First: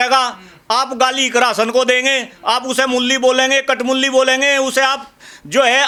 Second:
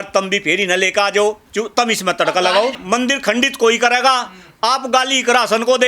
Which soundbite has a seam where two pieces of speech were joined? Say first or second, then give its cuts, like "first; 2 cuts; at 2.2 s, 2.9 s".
second; 1 cut; at 2.8 s